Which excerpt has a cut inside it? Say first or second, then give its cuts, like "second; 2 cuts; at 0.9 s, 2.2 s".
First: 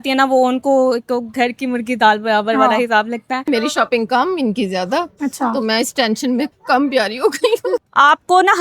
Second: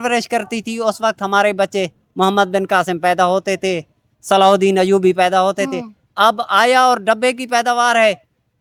first; 2 cuts; at 3.4 s, 7.8 s